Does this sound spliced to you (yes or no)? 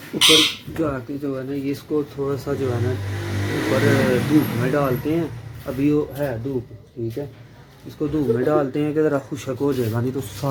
no